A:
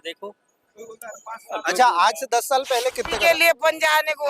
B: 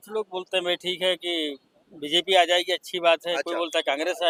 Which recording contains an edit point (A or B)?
A